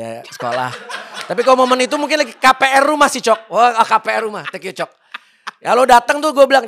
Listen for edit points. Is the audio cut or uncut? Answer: uncut